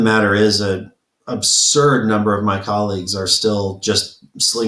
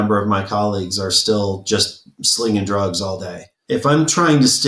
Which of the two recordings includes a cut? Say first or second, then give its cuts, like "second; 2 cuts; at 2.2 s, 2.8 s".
second; 1 cut; at 3.5 s